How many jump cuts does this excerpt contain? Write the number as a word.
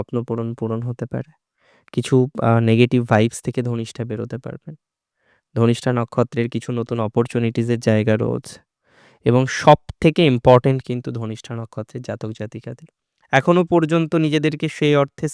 one